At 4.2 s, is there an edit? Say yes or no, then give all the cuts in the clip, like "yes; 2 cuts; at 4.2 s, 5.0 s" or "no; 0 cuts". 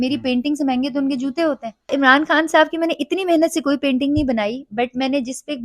no; 1 cut; at 1.9 s